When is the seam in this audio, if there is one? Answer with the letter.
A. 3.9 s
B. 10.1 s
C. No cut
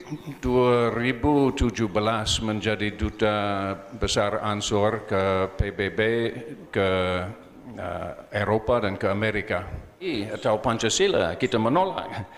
B